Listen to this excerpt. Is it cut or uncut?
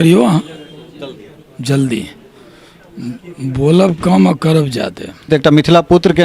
cut